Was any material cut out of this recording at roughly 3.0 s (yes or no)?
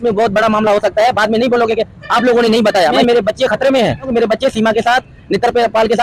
yes